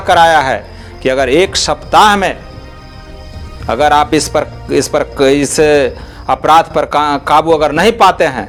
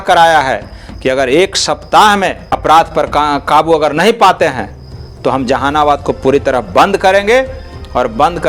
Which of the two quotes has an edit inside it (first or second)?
second